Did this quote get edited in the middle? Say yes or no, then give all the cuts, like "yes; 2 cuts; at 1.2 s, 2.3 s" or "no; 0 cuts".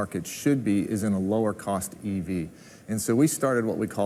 no; 0 cuts